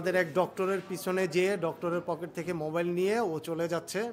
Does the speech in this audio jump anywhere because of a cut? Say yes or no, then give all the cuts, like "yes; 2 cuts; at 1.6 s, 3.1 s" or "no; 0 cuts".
no; 0 cuts